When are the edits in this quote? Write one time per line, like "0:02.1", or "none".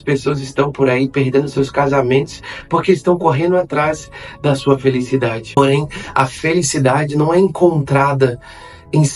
0:05.6

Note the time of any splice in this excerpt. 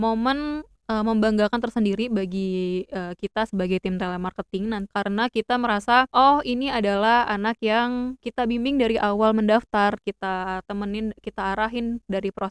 0:04.9
0:06.1
0:08.2

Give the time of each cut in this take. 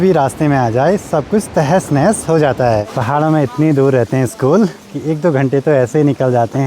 0:02.9

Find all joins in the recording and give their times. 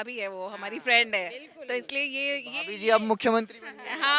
none

